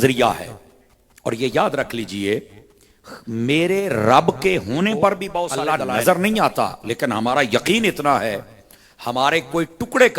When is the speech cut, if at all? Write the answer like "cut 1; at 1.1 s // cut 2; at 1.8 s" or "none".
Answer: cut 1; at 5.6 s